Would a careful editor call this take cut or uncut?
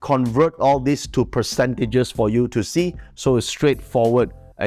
uncut